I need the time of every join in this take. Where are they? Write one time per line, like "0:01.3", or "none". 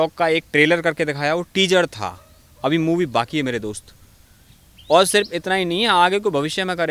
none